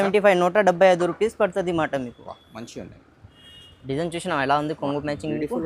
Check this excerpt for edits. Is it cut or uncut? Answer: cut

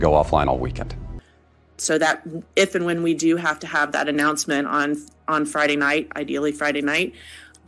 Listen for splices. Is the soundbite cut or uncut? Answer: cut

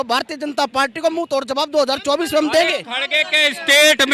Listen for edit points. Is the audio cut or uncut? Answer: uncut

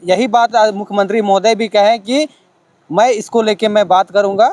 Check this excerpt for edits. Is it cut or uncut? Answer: uncut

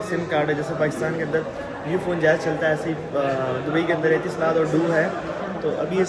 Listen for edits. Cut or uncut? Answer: uncut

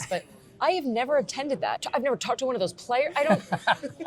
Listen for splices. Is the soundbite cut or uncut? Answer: cut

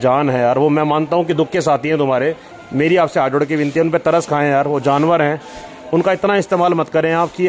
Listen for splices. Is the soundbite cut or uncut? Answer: cut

